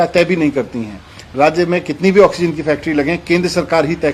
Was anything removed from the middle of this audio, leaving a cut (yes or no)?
no